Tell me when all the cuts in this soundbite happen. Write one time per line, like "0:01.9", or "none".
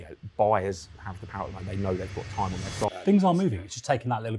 0:02.9